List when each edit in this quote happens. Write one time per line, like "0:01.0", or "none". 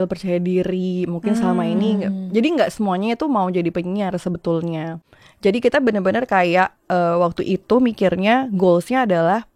0:05.0